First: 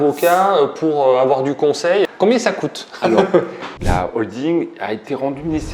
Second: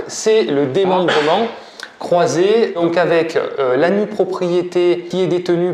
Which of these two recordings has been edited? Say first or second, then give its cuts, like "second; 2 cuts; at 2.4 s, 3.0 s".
first; 2 cuts; at 2.0 s, 3.7 s